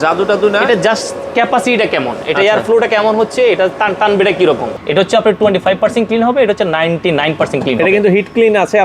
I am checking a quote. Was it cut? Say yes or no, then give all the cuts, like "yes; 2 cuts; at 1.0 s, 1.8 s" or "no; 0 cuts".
yes; 1 cut; at 4.7 s